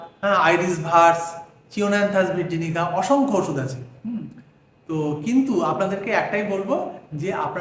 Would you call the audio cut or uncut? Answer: uncut